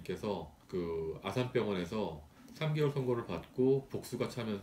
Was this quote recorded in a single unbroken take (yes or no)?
yes